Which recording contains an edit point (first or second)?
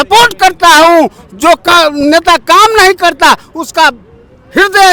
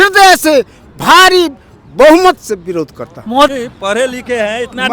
second